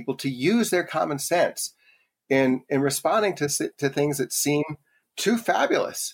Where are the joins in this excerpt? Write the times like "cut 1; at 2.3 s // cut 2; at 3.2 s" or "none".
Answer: cut 1; at 5.1 s